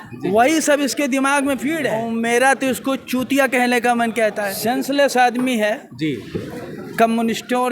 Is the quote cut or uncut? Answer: cut